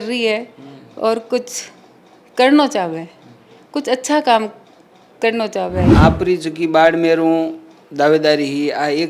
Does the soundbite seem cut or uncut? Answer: cut